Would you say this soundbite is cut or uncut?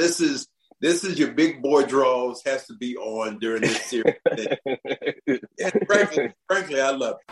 cut